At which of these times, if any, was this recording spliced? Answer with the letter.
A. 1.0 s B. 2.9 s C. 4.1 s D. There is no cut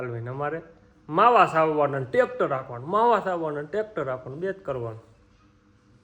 D